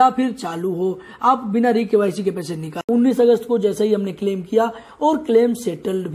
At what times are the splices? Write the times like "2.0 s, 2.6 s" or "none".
2.8 s